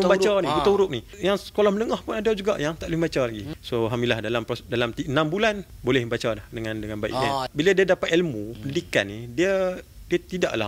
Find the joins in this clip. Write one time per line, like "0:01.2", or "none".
0:01.1
0:03.5
0:05.7
0:07.5